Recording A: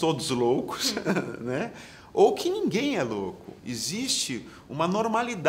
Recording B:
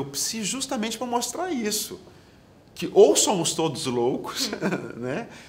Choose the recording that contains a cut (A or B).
A